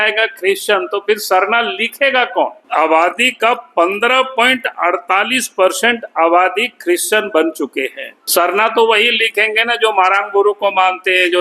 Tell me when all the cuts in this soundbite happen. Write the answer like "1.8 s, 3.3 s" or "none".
2.6 s, 8.2 s